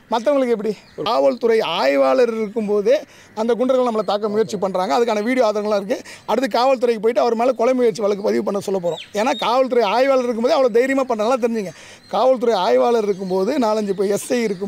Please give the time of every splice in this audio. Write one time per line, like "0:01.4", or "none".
0:01.0